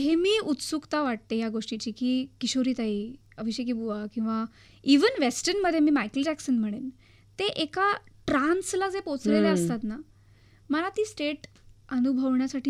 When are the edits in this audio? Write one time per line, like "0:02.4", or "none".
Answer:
none